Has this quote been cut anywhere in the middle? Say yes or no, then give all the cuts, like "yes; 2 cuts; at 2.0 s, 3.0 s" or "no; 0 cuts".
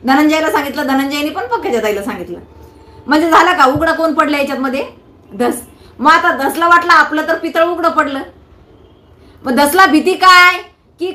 no; 0 cuts